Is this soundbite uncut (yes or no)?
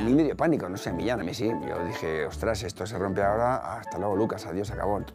yes